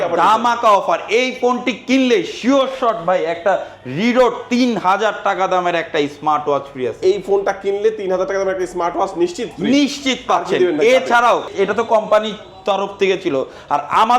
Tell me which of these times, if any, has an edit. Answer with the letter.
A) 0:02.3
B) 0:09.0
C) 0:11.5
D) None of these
C